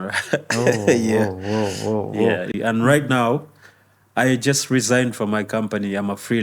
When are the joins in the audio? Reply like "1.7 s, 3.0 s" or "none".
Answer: 2.5 s